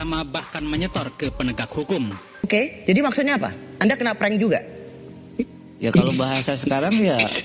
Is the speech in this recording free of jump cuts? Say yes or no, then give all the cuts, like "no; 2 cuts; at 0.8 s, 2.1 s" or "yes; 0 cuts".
no; 1 cut; at 2.5 s